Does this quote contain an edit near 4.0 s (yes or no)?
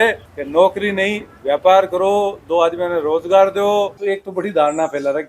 yes